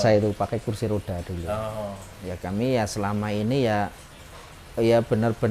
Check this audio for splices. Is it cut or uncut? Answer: cut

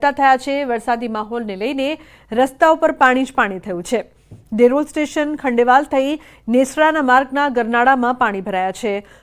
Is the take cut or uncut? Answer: uncut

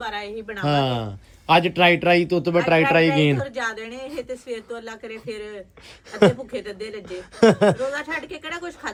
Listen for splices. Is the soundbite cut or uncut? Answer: uncut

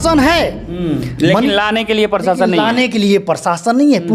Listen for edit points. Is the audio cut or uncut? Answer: uncut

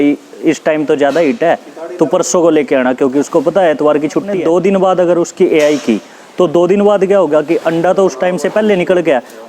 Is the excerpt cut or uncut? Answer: cut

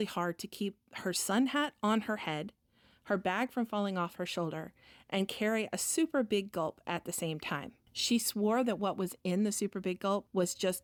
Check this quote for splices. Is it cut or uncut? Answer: uncut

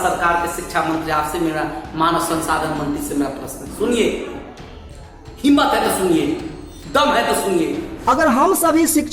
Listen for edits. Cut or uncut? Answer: cut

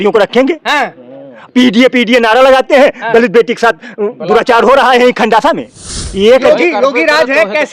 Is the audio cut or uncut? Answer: cut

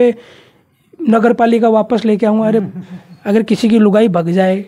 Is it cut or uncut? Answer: cut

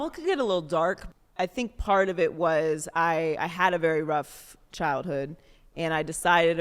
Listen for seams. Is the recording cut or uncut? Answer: cut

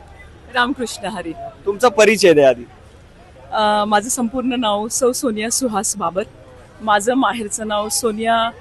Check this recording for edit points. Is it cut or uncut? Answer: uncut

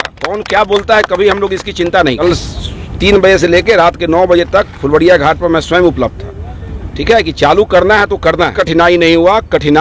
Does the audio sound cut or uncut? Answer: cut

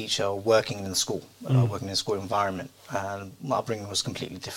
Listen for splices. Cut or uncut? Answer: uncut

